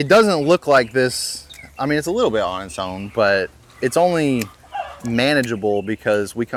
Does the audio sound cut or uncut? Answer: uncut